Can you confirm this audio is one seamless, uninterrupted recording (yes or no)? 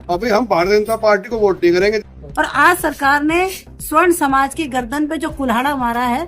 no